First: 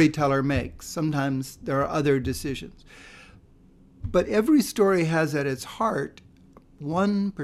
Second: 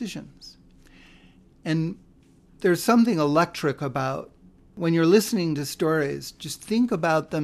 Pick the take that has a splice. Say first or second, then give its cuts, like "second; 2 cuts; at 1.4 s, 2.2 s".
second; 1 cut; at 4.7 s